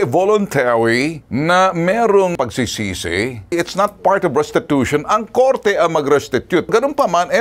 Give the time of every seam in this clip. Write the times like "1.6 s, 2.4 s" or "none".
3.5 s, 6.7 s